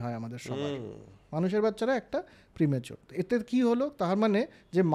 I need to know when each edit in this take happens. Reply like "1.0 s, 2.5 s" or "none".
none